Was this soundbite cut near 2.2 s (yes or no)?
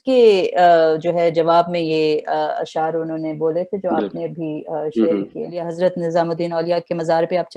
no